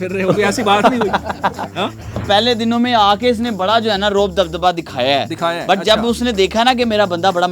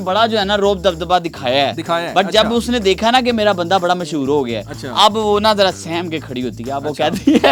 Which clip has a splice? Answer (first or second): first